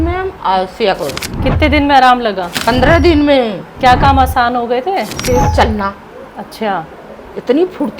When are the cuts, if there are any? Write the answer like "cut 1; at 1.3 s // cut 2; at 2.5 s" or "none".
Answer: cut 1; at 1.3 s // cut 2; at 2.5 s // cut 3; at 3.6 s // cut 4; at 5.1 s